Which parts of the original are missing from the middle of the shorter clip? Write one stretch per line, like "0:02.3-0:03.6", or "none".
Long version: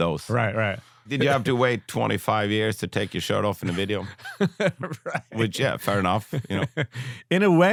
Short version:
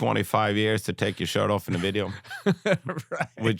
none